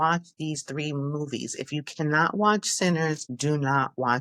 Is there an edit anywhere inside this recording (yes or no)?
no